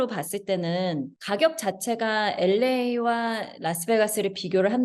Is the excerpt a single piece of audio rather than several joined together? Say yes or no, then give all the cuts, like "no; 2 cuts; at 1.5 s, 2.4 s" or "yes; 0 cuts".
yes; 0 cuts